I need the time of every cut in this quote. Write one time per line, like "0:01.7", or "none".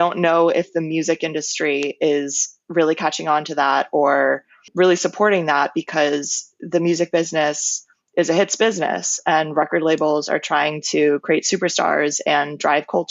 none